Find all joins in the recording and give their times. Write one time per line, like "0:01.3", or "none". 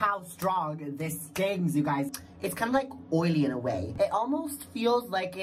0:02.1
0:03.9